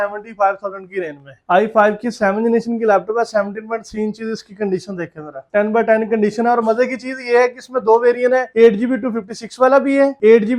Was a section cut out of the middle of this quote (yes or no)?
yes